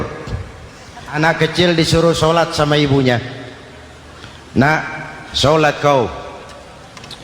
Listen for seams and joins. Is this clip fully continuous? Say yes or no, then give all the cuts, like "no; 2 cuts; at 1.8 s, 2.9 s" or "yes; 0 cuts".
no; 1 cut; at 1.2 s